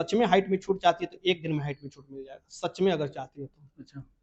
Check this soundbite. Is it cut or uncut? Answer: uncut